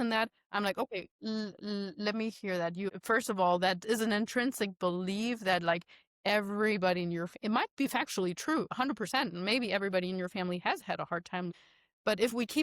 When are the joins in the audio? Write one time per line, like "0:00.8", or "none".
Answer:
0:02.9
0:11.5